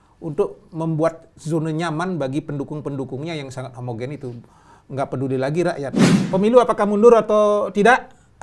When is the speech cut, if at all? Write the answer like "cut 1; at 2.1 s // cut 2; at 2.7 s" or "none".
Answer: cut 1; at 6.1 s